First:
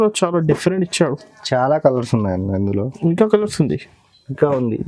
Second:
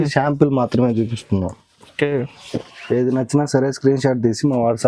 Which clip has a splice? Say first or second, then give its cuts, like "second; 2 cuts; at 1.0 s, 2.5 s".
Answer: second; 1 cut; at 2.4 s